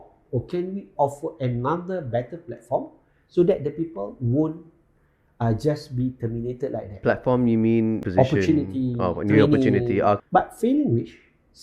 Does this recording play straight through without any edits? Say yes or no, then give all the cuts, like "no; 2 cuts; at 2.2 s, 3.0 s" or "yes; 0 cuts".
no; 3 cuts; at 6.9 s, 8.0 s, 10.2 s